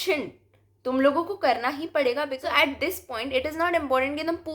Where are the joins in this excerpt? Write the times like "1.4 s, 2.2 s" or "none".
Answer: 2.4 s